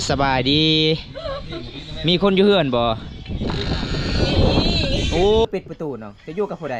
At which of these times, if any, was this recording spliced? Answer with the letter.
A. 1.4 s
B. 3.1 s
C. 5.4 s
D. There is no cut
C